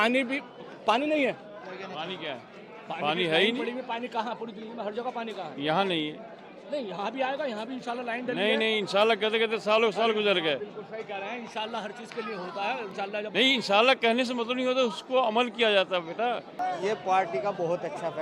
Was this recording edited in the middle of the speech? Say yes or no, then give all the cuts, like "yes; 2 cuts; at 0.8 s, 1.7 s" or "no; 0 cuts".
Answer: yes; 1 cut; at 16.5 s